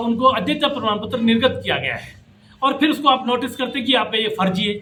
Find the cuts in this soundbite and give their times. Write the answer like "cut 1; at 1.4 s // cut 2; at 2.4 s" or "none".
none